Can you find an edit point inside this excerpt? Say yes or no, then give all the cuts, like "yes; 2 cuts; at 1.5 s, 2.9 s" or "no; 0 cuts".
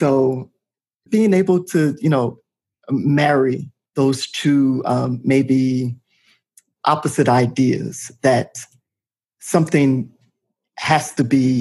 yes; 2 cuts; at 1.1 s, 3.7 s